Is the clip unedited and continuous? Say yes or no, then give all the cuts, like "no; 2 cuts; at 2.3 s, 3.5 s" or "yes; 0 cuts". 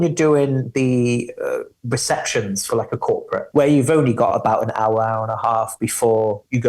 no; 1 cut; at 3.5 s